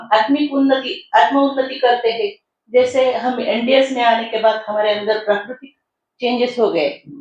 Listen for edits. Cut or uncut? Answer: uncut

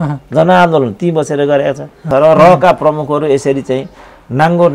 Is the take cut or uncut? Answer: cut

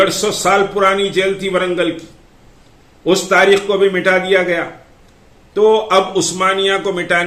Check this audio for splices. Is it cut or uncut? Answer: uncut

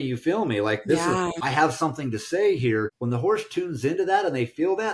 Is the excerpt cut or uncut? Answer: cut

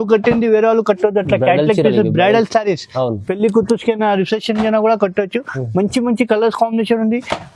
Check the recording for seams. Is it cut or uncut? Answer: uncut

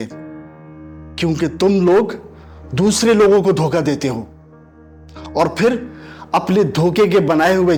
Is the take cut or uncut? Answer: uncut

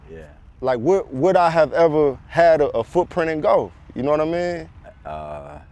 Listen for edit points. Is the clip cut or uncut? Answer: uncut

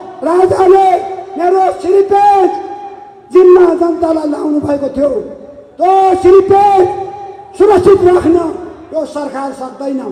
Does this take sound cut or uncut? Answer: uncut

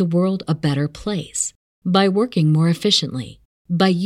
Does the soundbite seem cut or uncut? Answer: uncut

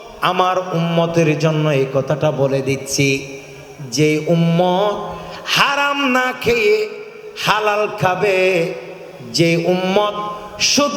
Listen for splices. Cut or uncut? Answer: uncut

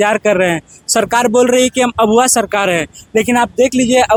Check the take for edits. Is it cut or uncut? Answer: uncut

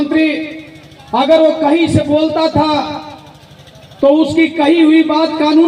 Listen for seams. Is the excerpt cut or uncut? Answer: uncut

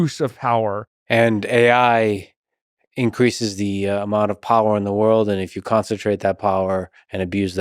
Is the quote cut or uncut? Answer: cut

